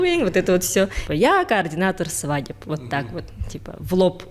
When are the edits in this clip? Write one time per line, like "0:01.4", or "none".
0:01.0